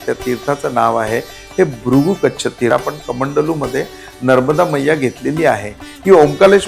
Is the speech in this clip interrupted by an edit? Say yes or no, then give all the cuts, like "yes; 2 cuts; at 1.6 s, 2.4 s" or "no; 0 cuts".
yes; 1 cut; at 2.7 s